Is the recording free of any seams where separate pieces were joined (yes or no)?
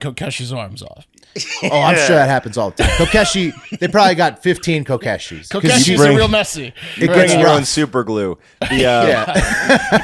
yes